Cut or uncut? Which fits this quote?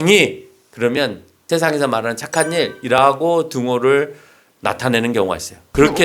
cut